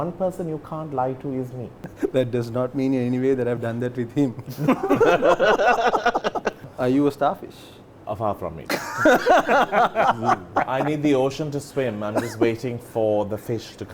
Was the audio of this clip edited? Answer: yes; 2 cuts; at 1.9 s, 6.7 s

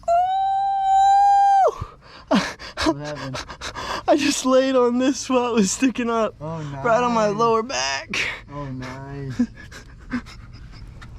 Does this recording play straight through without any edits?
yes; 0 cuts

